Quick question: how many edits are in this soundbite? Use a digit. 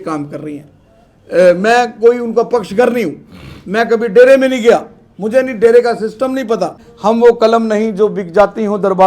1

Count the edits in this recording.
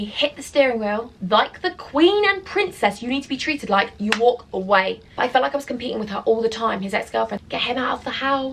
3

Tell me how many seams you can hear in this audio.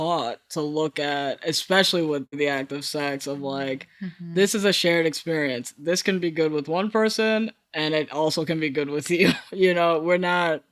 1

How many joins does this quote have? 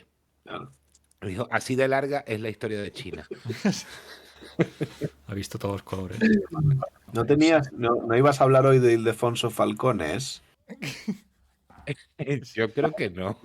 1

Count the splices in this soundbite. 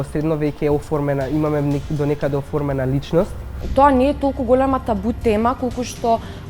1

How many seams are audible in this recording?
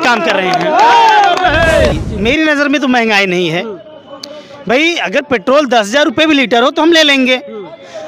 1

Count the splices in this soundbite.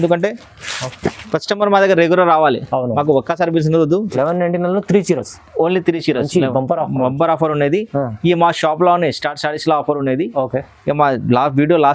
1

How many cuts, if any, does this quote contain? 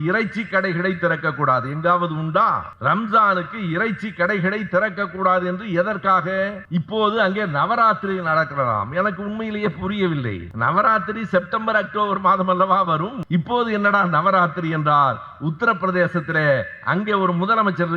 4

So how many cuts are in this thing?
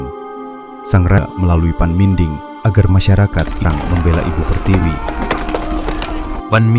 2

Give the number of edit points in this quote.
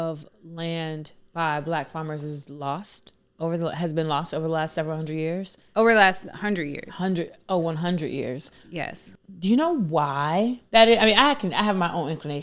1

